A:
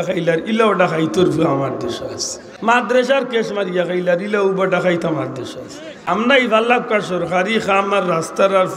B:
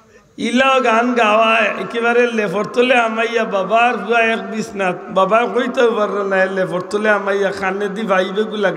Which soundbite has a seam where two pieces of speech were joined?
A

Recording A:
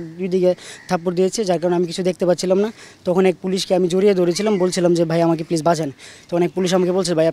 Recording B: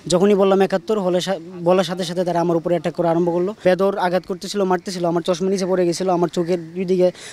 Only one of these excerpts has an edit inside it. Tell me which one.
B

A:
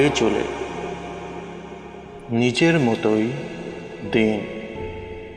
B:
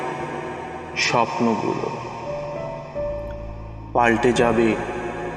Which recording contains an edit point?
A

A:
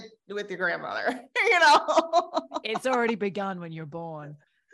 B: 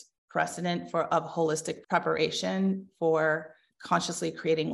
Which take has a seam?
B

